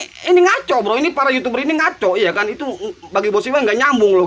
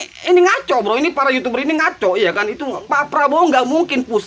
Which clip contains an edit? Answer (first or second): second